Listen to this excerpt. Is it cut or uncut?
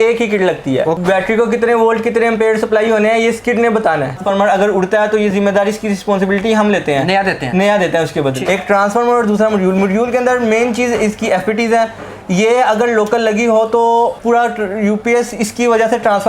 cut